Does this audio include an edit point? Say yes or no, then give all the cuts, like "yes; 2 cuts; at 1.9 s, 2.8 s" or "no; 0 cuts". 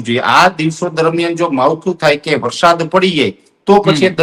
no; 0 cuts